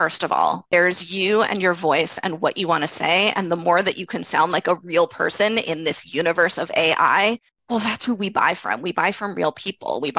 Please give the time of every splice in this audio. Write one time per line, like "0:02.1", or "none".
0:07.5